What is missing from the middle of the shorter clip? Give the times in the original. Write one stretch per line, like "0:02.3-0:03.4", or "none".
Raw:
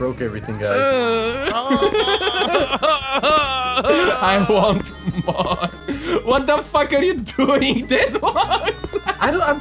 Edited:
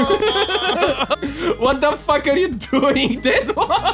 0:02.9-0:05.8